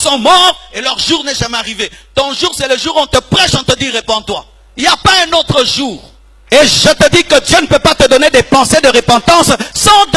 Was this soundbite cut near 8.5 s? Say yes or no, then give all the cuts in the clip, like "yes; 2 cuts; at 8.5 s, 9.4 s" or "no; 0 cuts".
no; 1 cut; at 6.4 s